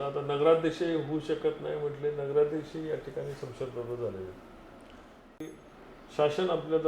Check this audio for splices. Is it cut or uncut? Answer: cut